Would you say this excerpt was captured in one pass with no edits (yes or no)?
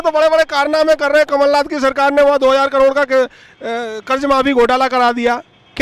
yes